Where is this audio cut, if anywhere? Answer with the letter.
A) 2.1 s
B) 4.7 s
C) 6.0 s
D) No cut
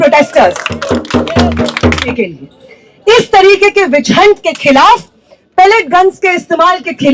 A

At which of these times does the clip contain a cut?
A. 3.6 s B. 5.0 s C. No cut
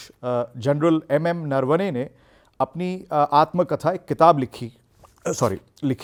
C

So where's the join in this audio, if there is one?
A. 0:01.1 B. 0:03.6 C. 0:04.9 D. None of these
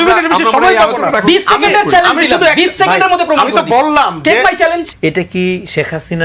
C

